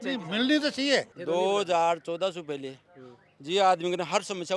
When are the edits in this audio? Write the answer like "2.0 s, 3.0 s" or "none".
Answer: 1.1 s